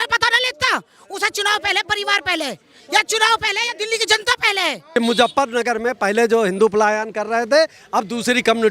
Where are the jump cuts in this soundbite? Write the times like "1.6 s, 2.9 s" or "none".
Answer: 4.9 s